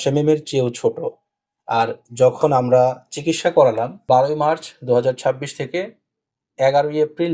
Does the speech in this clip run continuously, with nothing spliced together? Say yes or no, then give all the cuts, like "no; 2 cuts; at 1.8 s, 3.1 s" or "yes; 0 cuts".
no; 1 cut; at 3.9 s